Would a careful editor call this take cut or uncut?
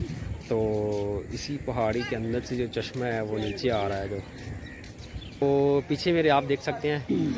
cut